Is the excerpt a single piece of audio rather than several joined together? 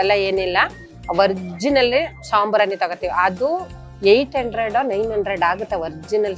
yes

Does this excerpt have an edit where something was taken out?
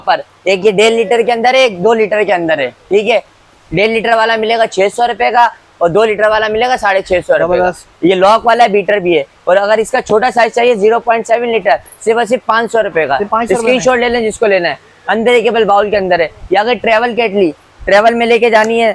no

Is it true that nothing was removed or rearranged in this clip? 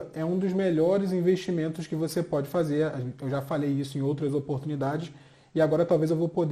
yes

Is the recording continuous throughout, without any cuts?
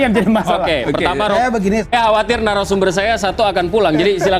no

